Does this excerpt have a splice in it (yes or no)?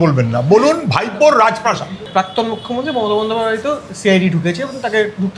no